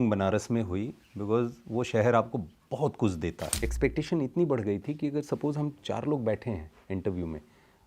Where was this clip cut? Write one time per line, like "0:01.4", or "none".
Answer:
0:03.5